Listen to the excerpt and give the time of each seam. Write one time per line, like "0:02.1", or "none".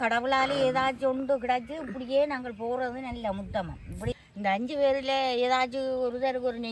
0:04.2